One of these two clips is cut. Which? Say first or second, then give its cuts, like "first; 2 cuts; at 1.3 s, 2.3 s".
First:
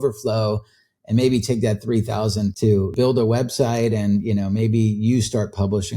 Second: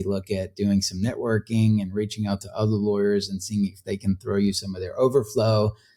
first; 1 cut; at 2.8 s